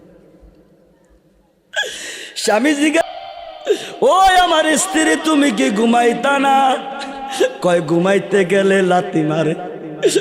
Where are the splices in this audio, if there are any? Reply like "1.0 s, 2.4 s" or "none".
3.0 s